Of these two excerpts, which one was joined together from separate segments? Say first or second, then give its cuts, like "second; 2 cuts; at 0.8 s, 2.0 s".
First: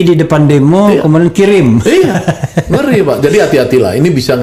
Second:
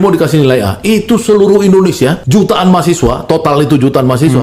second; 1 cut; at 2.2 s